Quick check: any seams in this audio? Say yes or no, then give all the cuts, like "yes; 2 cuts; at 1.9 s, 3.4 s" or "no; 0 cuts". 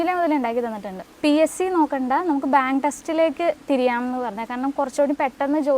yes; 1 cut; at 1.0 s